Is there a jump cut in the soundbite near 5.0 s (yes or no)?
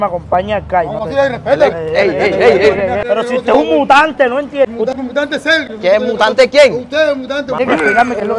yes